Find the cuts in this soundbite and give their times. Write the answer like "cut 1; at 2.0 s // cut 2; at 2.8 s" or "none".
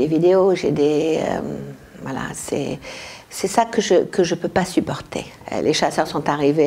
cut 1; at 5.3 s